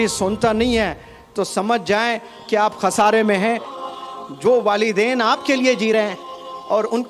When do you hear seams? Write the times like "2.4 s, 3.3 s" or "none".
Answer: 3.7 s